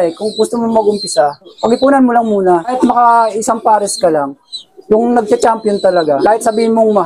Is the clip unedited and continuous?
no; 5 cuts; at 1.5 s, 2.7 s, 4.5 s, 5.3 s, 6.2 s

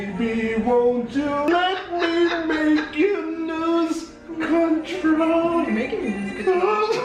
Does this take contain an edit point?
yes; 1 cut; at 1.5 s

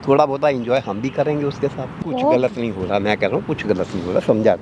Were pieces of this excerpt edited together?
yes; 1 cut; at 2.0 s

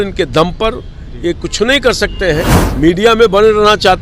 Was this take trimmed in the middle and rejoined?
yes; 1 cut; at 2.6 s

